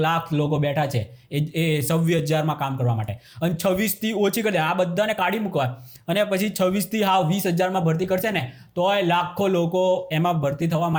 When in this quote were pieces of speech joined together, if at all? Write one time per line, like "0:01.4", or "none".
none